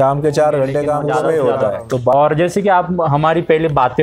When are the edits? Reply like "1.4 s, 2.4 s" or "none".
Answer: 1.0 s, 2.1 s